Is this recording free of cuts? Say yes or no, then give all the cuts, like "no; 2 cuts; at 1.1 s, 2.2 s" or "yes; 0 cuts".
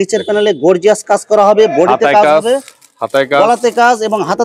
yes; 0 cuts